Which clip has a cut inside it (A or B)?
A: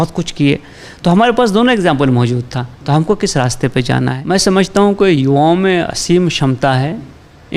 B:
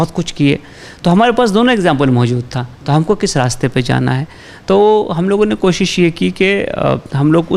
A